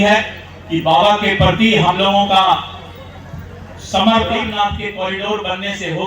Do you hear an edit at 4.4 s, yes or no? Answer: yes